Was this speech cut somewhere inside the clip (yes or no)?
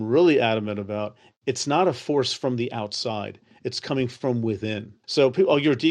yes